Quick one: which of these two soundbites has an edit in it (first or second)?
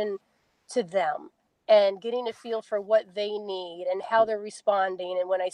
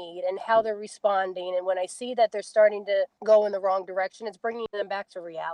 second